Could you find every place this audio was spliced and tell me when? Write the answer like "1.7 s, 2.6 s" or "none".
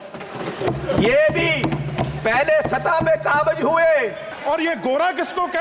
4.3 s